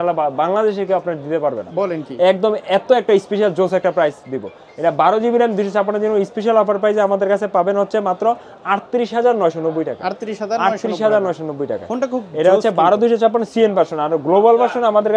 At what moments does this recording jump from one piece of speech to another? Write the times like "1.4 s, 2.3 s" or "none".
none